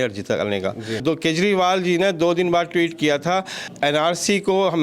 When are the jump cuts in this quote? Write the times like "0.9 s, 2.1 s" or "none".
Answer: 1.0 s, 3.6 s